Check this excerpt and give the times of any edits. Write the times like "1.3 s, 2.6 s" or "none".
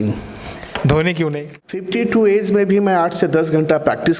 1.8 s